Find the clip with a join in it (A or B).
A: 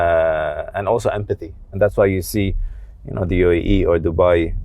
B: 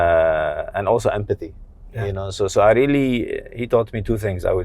A